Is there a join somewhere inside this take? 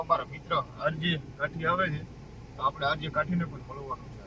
no; 0 cuts

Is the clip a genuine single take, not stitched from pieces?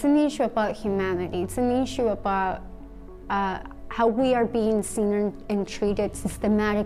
yes; 0 cuts

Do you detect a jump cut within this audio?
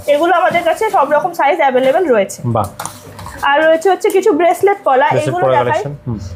no; 0 cuts

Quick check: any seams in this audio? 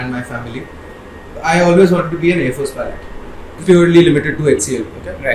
yes; 1 cut; at 3.6 s

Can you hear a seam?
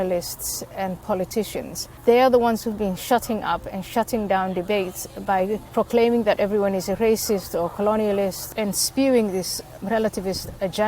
yes; 4 cuts; at 1.9 s, 5.7 s, 8.5 s, 9.7 s

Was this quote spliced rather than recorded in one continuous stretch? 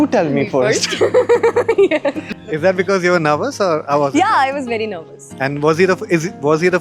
no; 0 cuts

